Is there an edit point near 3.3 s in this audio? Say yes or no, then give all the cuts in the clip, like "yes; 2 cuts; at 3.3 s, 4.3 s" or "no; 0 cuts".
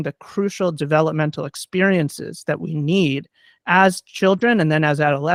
no; 0 cuts